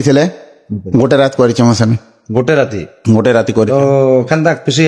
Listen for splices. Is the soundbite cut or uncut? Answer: uncut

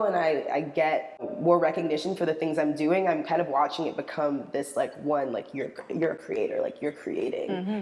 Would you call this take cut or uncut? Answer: cut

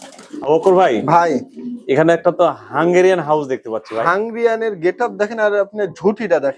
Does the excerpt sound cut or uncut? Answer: uncut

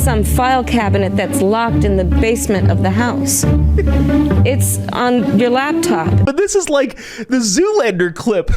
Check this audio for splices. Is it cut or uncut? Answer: cut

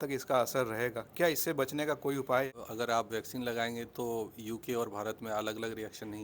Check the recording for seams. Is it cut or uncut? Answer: cut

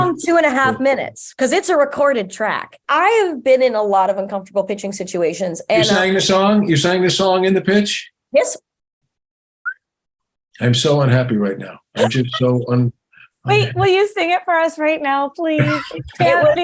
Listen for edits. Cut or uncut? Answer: cut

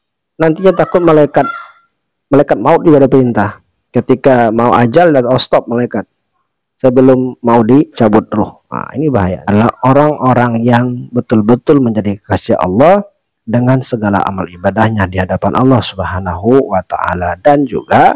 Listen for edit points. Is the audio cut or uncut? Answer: cut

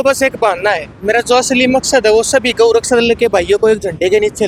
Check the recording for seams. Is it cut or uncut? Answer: uncut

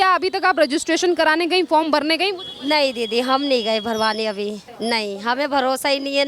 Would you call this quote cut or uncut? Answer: cut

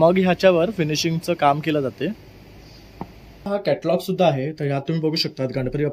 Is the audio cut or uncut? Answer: cut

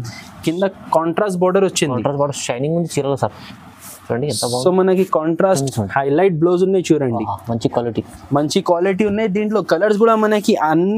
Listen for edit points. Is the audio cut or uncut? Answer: cut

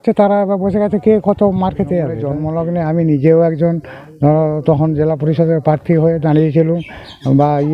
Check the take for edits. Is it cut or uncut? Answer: cut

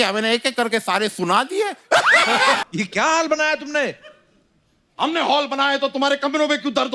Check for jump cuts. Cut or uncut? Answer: cut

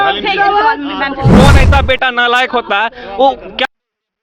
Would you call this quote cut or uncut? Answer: cut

